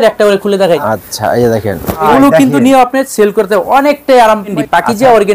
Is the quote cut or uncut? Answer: cut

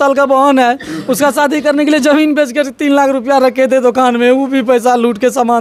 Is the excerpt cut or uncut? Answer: uncut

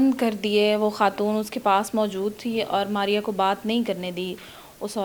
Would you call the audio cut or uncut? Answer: uncut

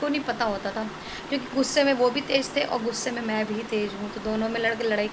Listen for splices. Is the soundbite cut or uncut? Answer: uncut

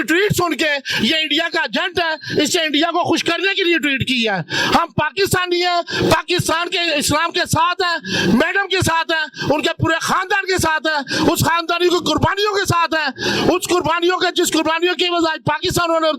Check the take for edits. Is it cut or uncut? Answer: uncut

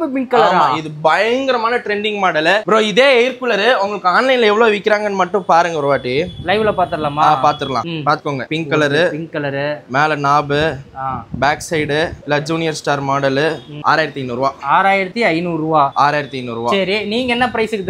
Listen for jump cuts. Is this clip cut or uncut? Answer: uncut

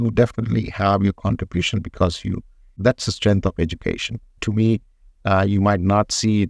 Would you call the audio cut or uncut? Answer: uncut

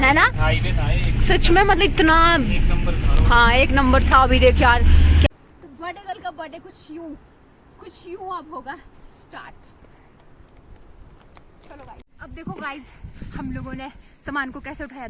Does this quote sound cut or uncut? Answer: cut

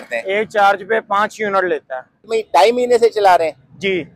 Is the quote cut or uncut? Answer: cut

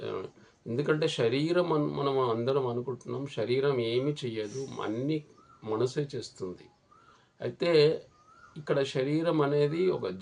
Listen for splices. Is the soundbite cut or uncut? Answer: uncut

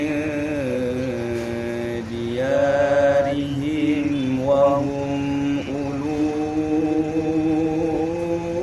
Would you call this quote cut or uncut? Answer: uncut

